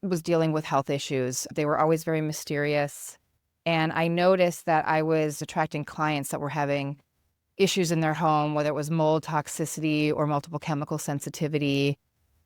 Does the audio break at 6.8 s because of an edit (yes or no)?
no